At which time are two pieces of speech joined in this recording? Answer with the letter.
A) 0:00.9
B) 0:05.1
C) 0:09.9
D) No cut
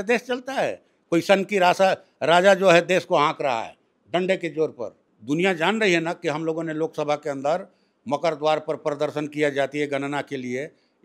B